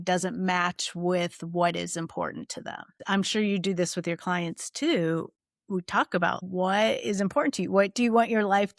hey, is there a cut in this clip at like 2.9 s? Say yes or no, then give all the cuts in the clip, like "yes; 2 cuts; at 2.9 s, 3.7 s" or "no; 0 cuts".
yes; 2 cuts; at 2.9 s, 6.4 s